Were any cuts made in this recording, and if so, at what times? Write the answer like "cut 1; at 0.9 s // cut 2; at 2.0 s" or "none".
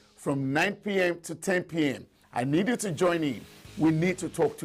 none